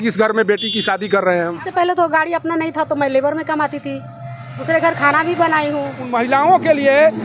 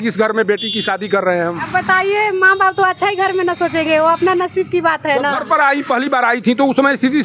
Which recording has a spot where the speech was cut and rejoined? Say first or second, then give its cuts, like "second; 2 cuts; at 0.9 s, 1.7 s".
first; 2 cuts; at 1.6 s, 6.0 s